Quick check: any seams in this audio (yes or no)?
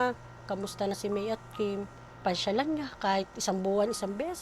yes